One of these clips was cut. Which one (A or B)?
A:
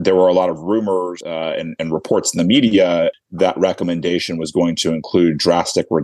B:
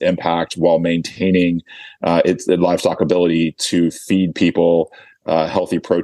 A